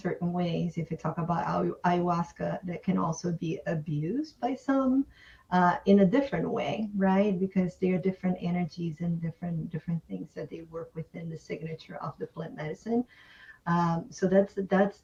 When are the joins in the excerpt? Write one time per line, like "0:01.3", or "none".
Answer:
none